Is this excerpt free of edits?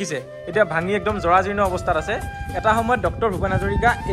yes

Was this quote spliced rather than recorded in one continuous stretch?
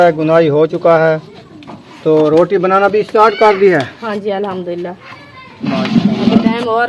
no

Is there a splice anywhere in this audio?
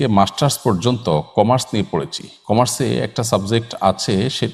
no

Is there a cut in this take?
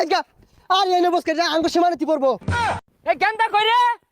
yes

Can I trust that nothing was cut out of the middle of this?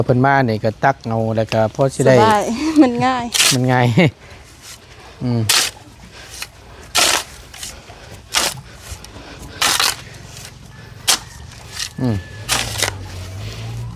yes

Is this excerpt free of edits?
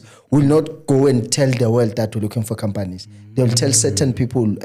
yes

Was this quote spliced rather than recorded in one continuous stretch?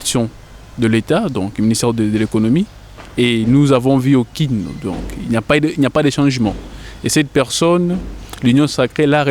no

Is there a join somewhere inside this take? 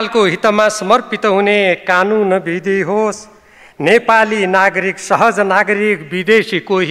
no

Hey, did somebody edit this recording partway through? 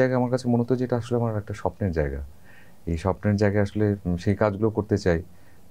no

